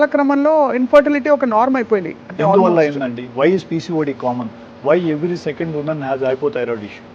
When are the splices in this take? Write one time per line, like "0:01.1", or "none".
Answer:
0:02.2